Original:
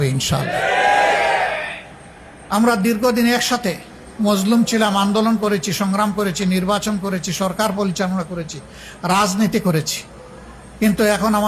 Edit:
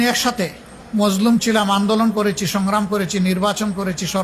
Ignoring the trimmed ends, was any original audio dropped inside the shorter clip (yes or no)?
no